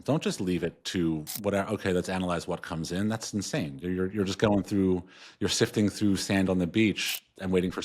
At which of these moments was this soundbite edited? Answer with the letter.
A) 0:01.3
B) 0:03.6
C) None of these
A